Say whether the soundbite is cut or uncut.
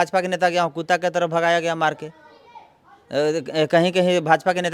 uncut